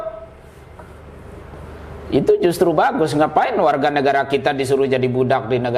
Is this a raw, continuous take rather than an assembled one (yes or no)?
yes